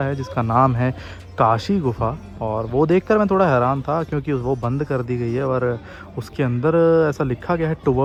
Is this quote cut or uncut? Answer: uncut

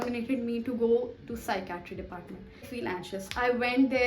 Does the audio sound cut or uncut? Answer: cut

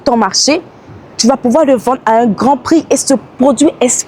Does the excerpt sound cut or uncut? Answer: uncut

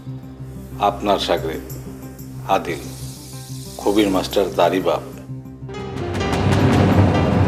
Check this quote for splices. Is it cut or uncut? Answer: uncut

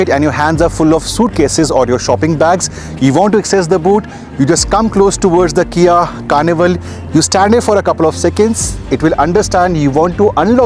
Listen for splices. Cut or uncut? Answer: uncut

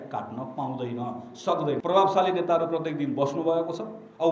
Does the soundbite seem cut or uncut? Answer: cut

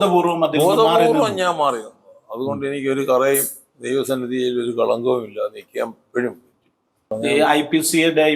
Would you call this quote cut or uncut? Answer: cut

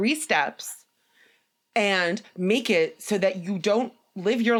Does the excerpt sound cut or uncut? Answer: uncut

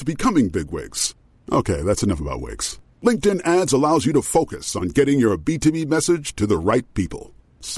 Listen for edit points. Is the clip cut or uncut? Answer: uncut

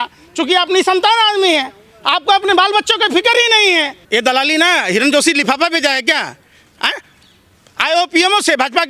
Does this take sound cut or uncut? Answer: cut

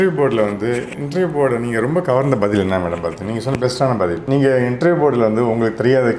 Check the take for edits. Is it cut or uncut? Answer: cut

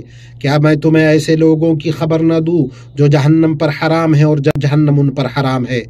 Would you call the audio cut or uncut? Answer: cut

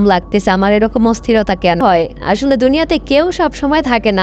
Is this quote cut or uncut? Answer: cut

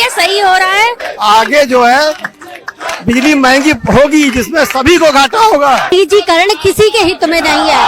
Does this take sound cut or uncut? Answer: cut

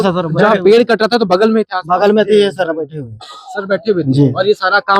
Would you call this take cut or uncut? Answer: uncut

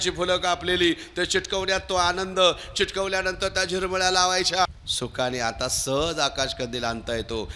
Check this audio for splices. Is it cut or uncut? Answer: cut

